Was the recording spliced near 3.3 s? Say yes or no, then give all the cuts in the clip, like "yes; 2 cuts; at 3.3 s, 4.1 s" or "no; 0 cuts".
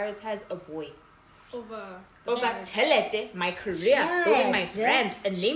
no; 0 cuts